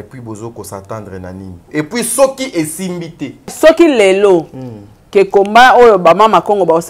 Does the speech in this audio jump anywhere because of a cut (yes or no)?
yes